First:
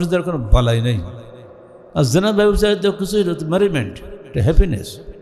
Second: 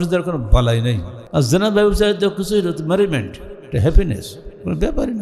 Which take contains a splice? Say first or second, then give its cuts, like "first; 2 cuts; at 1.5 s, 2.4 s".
second; 1 cut; at 1.1 s